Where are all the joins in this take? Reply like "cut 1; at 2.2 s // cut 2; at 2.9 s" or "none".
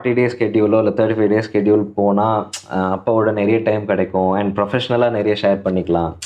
none